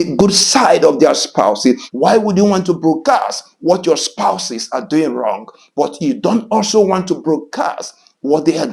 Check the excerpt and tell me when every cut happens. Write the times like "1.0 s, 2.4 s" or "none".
1.9 s